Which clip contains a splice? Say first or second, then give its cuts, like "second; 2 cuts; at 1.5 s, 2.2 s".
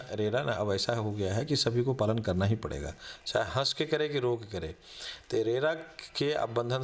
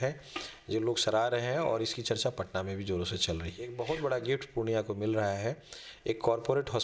second; 1 cut; at 3.6 s